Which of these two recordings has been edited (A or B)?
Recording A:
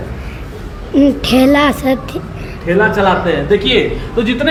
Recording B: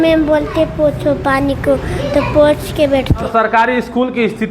B